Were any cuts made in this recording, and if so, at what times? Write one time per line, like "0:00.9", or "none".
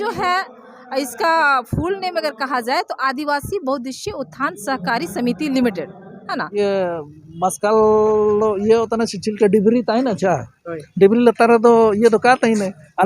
0:06.5